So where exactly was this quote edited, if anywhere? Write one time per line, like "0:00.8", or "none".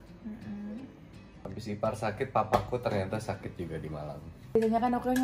0:01.4
0:04.6